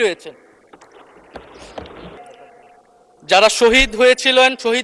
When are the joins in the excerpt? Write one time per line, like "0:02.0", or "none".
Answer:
0:02.2